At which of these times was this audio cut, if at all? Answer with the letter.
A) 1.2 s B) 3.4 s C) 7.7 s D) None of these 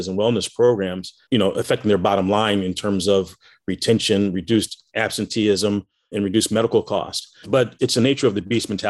C